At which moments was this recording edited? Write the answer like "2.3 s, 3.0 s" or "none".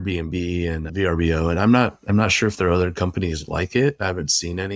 none